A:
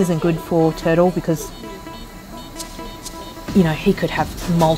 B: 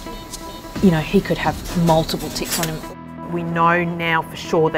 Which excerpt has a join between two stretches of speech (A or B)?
B